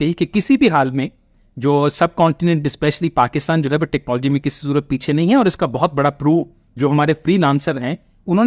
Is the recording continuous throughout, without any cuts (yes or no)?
yes